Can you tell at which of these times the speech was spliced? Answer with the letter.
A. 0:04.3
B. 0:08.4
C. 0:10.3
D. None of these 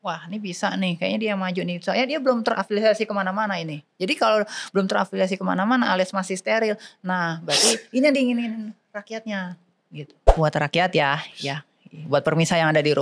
C